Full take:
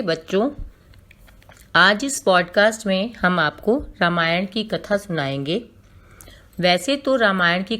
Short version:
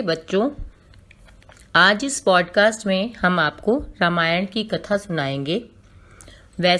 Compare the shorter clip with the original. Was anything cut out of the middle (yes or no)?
no